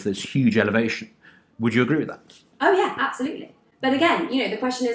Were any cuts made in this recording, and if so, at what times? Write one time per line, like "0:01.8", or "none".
none